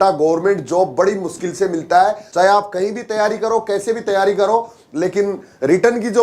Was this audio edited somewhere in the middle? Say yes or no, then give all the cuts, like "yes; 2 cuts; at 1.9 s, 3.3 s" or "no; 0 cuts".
yes; 1 cut; at 2.2 s